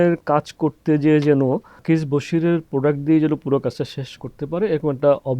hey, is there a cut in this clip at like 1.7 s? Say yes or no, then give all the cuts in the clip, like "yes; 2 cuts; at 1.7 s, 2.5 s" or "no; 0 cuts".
yes; 1 cut; at 1.7 s